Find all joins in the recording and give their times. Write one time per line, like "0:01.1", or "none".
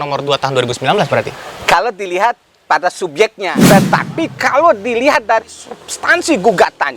0:03.6

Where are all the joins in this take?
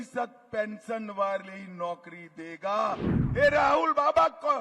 0:03.1

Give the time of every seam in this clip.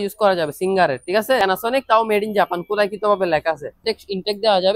0:01.4
0:03.8

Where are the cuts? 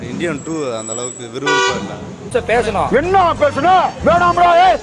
0:02.2

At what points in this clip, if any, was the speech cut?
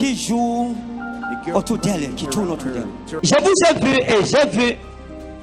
0:03.1

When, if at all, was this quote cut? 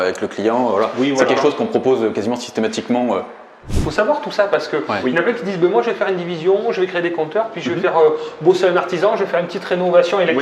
0:03.7

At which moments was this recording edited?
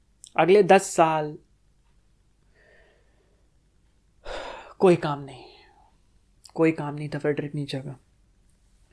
none

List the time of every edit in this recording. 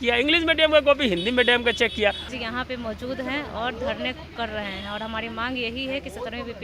0:02.2

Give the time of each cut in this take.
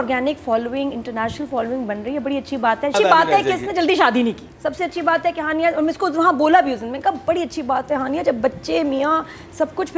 0:02.9

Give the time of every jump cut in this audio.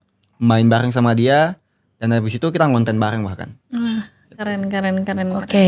none

